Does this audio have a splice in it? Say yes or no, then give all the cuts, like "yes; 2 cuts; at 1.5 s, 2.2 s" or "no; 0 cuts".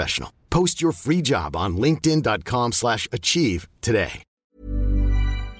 yes; 1 cut; at 4.2 s